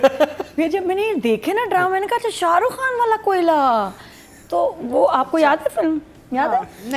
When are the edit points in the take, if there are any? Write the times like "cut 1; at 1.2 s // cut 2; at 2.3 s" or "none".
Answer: none